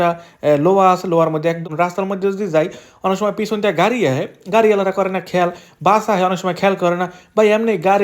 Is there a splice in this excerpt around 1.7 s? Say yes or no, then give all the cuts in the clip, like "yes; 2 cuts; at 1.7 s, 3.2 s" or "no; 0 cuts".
yes; 1 cut; at 1.7 s